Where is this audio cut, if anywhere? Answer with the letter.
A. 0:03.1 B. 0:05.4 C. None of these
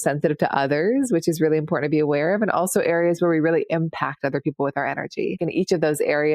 B